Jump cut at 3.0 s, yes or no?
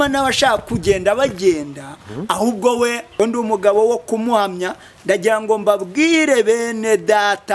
yes